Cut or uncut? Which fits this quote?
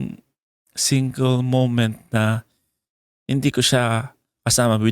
uncut